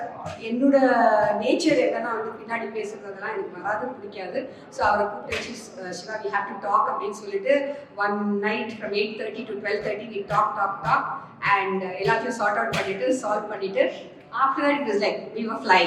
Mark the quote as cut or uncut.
uncut